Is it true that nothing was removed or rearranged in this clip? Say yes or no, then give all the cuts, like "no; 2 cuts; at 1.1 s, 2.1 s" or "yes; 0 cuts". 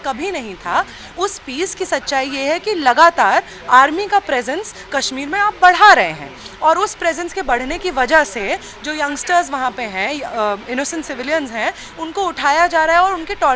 yes; 0 cuts